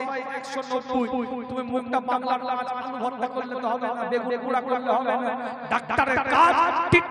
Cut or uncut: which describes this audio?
uncut